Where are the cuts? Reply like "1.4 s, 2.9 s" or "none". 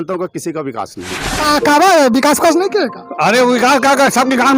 1.3 s